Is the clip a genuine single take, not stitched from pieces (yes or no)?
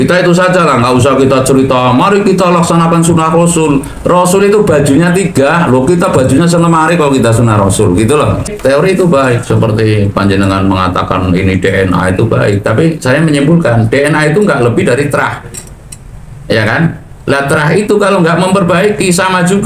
no